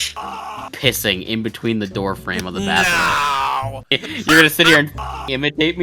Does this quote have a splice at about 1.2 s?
no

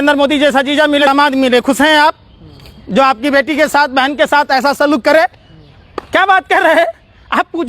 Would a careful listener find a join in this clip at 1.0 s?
yes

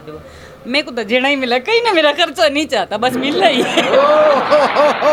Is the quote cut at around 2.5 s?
no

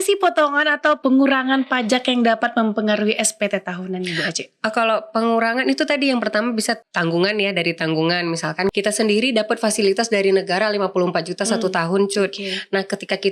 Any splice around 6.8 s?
yes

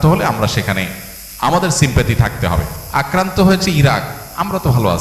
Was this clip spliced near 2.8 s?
yes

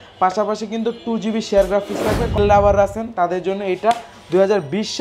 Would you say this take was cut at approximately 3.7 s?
no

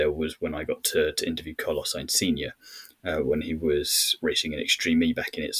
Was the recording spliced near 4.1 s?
yes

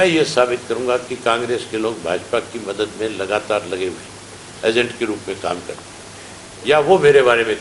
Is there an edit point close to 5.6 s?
no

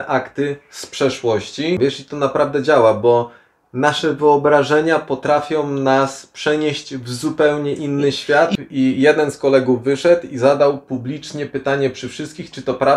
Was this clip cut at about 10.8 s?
no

